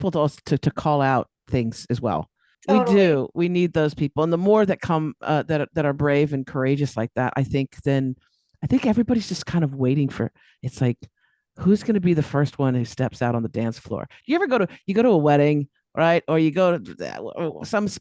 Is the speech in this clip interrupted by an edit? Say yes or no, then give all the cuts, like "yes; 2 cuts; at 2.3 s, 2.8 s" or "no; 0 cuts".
yes; 1 cut; at 2.5 s